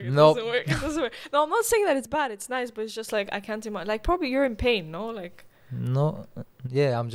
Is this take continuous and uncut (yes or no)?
yes